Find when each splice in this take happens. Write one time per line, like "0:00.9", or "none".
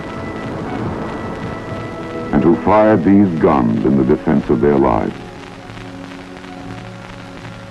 0:04.4